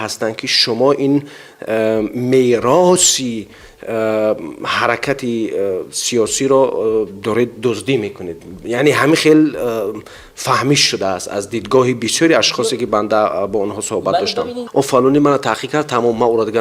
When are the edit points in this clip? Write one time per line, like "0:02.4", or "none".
0:14.6